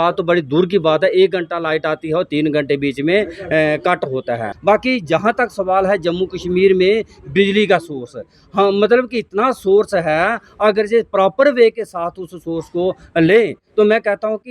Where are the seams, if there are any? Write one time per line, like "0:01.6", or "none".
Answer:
0:04.5